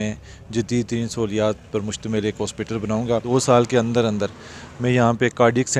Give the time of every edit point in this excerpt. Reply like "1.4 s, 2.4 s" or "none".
3.2 s